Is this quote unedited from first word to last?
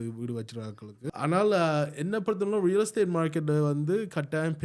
no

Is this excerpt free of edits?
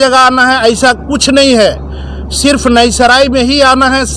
yes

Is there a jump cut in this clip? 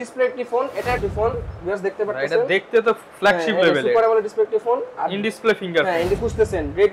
yes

